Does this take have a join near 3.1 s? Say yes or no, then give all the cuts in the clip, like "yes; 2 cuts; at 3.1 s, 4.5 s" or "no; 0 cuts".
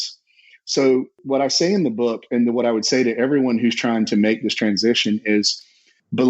no; 1 cut; at 1.1 s